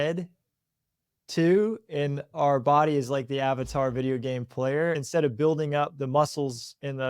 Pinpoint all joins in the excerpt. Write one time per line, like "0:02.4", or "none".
0:05.0